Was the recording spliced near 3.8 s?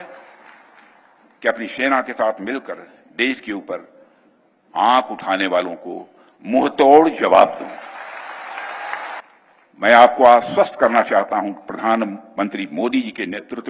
no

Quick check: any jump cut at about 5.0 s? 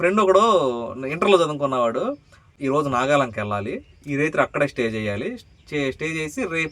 no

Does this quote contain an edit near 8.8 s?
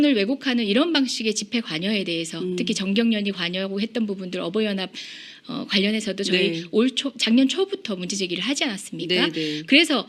no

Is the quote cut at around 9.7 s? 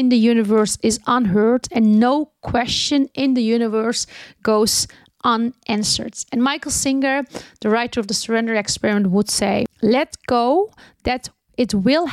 yes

